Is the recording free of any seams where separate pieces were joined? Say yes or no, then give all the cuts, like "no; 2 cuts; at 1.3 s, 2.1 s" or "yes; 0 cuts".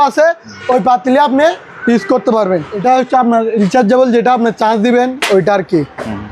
no; 1 cut; at 2.8 s